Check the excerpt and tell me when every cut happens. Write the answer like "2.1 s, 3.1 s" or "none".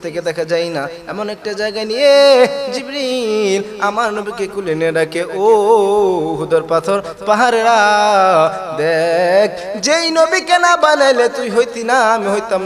none